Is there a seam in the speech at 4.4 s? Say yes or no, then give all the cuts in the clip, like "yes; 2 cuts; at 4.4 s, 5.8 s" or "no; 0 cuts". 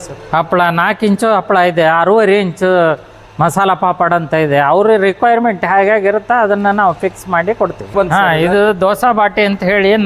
no; 1 cut; at 7.9 s